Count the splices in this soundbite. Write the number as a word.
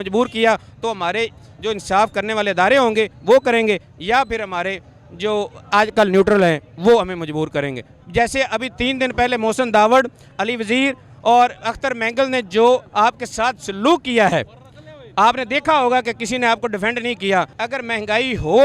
two